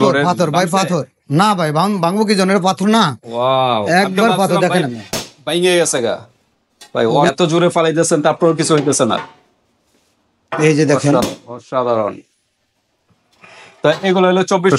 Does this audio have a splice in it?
yes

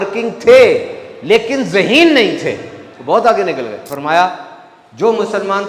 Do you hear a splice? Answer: yes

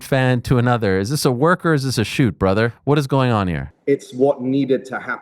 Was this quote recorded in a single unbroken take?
no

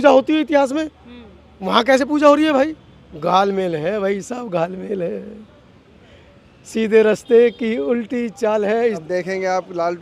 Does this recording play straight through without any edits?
no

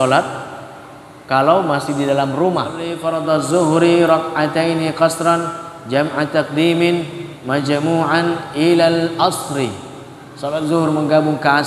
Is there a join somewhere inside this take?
yes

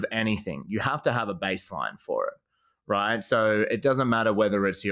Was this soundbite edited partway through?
no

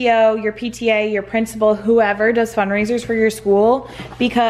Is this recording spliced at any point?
no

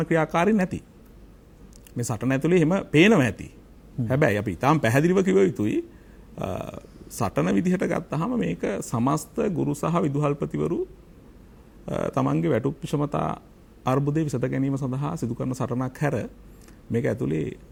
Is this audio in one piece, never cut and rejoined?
yes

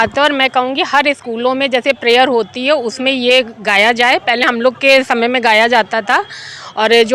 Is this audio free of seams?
yes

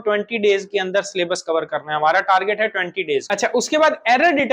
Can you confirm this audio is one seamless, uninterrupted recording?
no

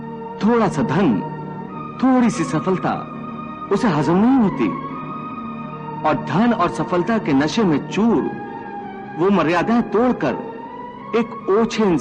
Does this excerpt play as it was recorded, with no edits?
yes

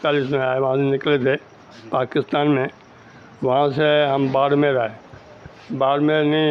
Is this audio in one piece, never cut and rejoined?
yes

